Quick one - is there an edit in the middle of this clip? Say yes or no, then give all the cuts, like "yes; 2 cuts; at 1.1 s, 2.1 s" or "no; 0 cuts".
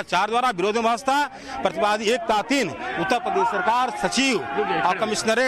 no; 0 cuts